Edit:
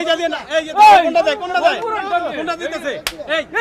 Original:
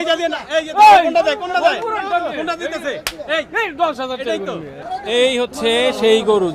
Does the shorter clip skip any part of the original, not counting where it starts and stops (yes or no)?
no